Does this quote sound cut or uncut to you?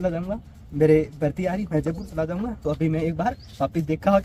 uncut